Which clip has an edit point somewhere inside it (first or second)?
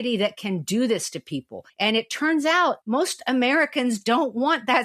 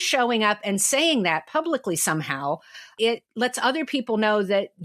first